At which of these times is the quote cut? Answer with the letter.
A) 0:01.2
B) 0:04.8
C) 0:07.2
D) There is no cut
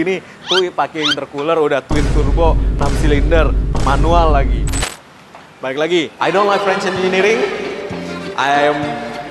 B